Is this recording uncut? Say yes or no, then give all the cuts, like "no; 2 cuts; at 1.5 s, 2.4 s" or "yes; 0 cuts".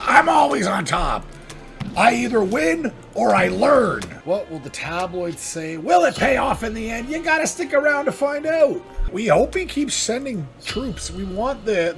no; 2 cuts; at 4.1 s, 9.1 s